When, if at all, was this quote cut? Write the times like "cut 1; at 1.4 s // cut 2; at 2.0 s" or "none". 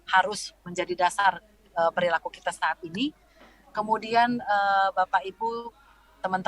none

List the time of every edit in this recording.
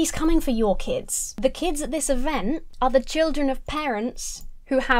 cut 1; at 2.7 s

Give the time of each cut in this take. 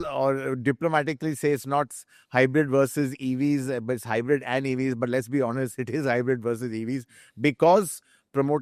none

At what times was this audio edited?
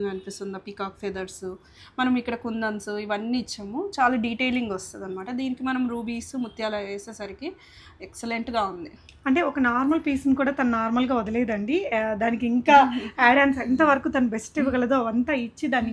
none

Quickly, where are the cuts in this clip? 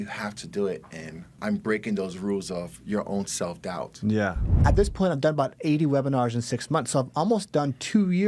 cut 1; at 1.4 s // cut 2; at 4.6 s

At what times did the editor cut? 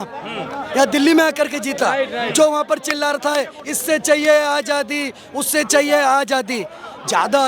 none

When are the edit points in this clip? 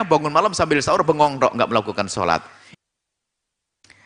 cut 1; at 2.6 s

